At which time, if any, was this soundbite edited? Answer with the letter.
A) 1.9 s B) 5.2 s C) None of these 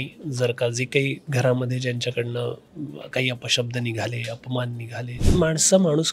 B